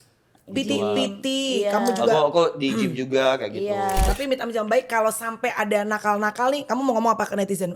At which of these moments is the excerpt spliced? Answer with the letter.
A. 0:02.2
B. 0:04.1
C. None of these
B